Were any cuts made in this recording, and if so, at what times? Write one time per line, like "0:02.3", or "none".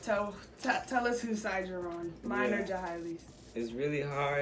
none